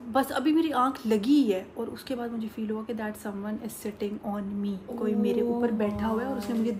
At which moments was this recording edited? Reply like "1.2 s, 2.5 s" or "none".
none